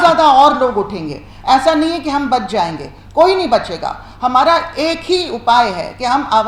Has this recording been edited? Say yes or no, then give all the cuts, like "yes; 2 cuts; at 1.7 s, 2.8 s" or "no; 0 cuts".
no; 0 cuts